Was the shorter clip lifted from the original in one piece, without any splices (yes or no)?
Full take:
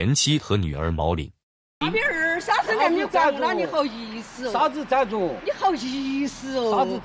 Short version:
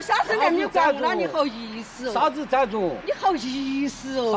yes